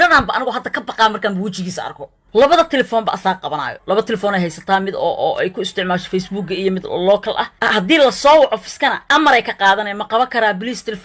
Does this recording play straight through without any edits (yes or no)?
no